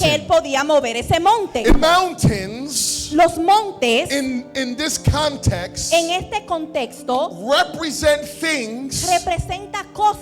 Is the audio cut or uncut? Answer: cut